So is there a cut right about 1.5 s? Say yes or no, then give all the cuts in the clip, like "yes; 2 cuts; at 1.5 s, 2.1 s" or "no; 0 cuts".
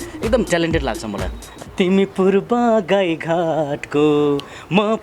yes; 1 cut; at 1.5 s